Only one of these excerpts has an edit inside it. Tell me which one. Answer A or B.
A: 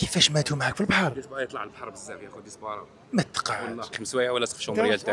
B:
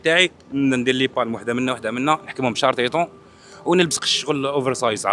A